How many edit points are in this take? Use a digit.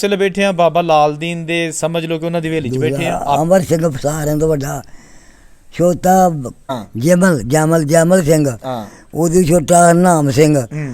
1